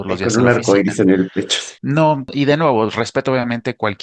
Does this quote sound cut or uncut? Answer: cut